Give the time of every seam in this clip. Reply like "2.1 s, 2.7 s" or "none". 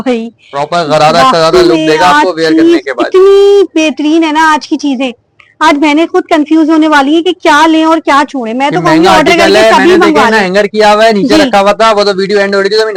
none